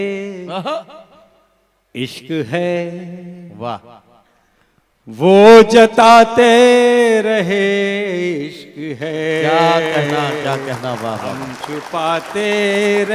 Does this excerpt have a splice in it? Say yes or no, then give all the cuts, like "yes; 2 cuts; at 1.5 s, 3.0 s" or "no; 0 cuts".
no; 0 cuts